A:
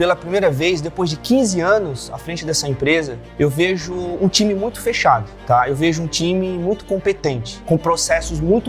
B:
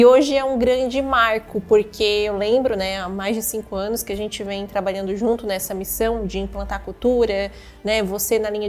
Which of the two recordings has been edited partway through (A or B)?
A